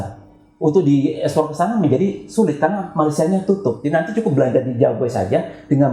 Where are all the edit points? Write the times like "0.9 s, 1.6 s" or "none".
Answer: 3.8 s